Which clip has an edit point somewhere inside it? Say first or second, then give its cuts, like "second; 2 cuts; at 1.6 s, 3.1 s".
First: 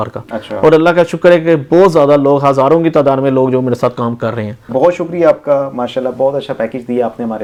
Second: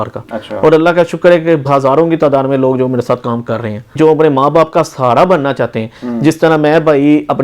second; 2 cuts; at 1.7 s, 3.9 s